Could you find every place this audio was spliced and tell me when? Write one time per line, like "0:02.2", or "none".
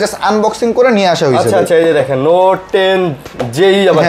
none